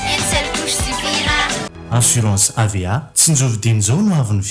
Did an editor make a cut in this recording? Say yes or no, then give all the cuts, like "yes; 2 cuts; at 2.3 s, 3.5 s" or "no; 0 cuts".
yes; 1 cut; at 1.8 s